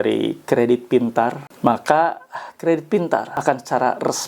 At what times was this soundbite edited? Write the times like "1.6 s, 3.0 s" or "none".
1.5 s, 3.3 s